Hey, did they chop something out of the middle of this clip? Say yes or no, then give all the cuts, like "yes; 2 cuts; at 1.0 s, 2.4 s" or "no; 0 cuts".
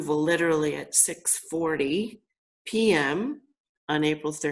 no; 0 cuts